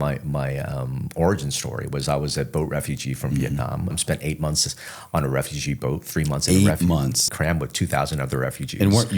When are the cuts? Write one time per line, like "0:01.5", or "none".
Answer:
0:03.9
0:07.2